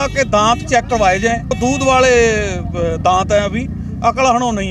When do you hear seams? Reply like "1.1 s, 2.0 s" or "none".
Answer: 1.6 s